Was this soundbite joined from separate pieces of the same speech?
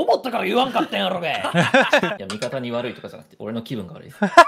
yes; 1 cut; at 2.2 s

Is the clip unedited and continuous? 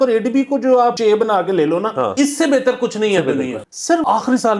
no; 3 cuts; at 1.0 s, 2.1 s, 3.7 s

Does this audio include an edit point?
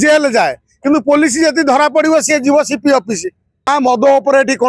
yes; 1 cut; at 3.7 s

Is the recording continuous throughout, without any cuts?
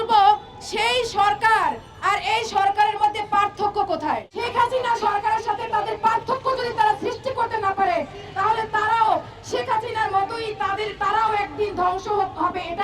no; 1 cut; at 4.3 s

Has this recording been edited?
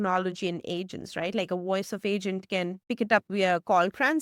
no; 0 cuts

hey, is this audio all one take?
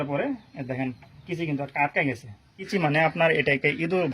no; 1 cut; at 2.6 s

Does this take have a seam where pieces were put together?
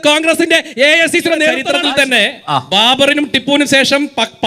yes; 1 cut; at 1.7 s

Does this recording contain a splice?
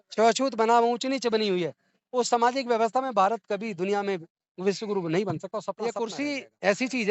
yes; 1 cut; at 5.9 s

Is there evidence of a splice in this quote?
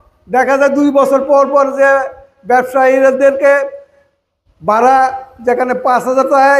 no; 0 cuts

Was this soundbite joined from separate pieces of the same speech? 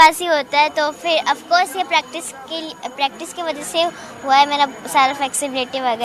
no; 0 cuts

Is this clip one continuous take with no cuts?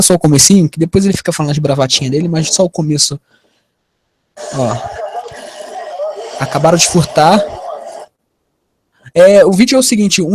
yes; 0 cuts

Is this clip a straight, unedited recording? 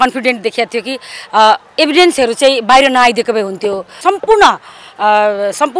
no; 1 cut; at 4.0 s

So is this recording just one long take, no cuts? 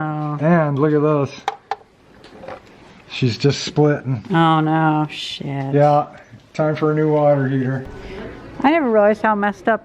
no; 1 cut; at 7.9 s

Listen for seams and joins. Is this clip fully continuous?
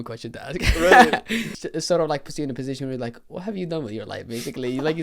no; 1 cut; at 1.5 s

